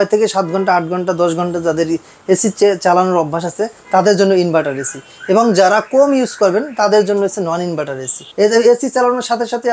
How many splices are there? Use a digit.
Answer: 1